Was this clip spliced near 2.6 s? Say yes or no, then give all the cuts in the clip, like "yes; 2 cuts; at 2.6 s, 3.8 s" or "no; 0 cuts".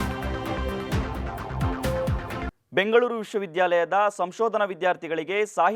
no; 0 cuts